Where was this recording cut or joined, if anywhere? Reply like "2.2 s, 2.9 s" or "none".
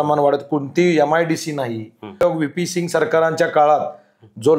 2.2 s

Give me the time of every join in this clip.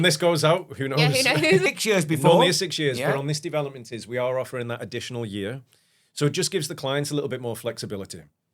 1.7 s

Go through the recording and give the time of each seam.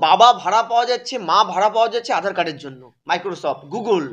2.9 s

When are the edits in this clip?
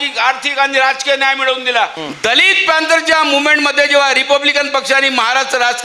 2.0 s

